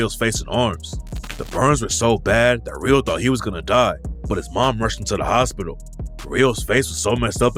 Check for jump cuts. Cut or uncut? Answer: uncut